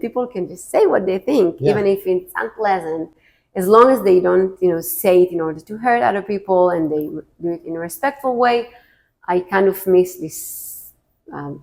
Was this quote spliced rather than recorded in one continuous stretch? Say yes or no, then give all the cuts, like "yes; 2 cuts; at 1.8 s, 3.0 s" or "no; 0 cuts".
no; 0 cuts